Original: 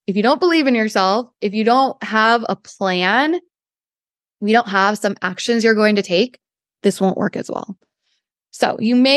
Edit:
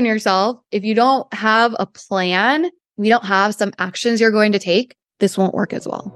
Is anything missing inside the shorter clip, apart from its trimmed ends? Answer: yes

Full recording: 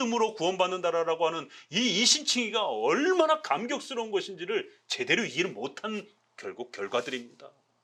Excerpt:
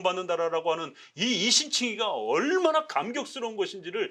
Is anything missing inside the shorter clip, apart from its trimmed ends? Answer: no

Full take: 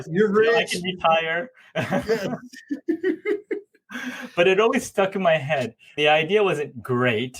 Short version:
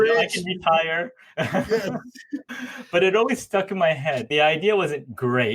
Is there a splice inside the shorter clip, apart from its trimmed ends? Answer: yes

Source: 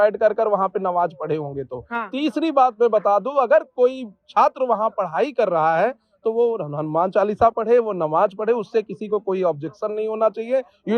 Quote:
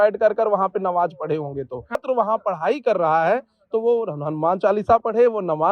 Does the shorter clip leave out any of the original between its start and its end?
yes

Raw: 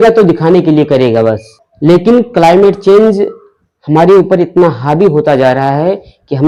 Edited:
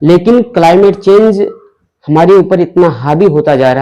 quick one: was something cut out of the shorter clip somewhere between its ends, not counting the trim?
no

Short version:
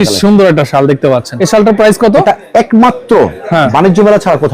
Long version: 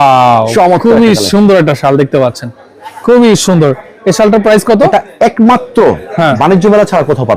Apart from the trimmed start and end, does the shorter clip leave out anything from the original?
yes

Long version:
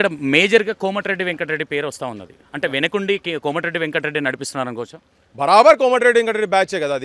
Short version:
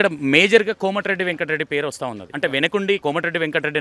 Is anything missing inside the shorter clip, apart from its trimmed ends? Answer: yes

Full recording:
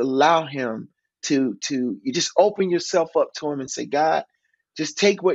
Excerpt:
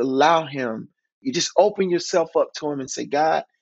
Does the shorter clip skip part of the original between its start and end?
yes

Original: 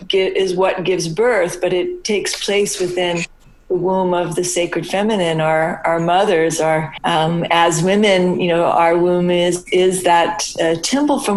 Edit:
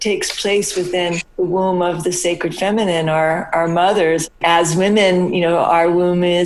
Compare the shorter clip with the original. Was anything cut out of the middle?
yes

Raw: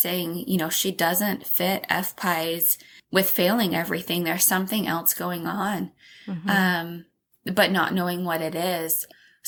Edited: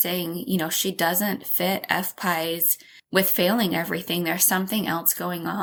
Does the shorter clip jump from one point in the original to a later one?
no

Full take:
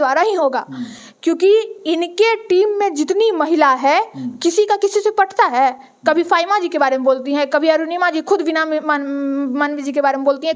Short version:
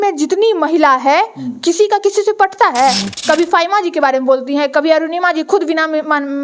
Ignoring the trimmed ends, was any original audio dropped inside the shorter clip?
no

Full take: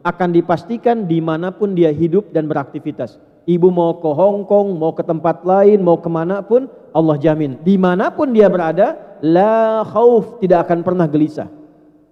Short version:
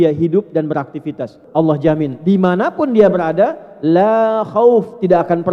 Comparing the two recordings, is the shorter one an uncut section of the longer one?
no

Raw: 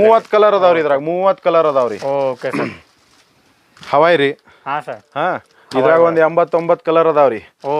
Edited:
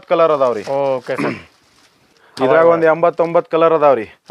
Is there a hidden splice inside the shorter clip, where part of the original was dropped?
yes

